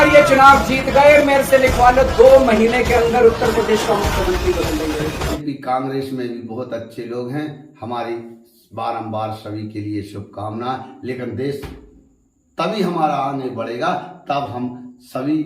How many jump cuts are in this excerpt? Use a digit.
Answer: 1